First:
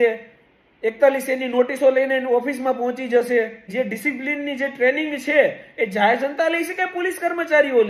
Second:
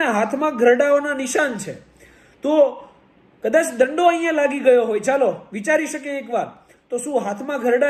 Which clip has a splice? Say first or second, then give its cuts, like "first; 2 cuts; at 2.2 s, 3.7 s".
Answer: first; 1 cut; at 3.6 s